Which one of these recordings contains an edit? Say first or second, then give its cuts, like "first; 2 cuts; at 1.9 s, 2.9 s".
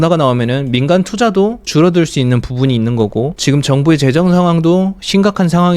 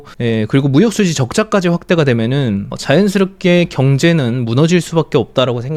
first; 2 cuts; at 1.7 s, 3.4 s